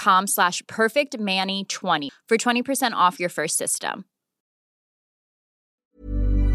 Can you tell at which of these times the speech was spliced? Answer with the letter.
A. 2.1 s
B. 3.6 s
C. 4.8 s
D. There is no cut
A